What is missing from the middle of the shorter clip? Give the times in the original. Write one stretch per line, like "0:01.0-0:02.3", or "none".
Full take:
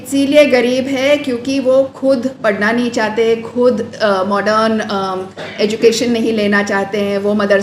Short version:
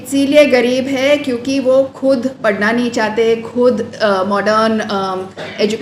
none